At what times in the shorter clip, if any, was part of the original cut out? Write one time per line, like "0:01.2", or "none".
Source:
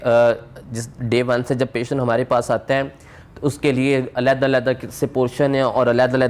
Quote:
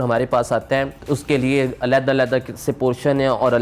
0:01.0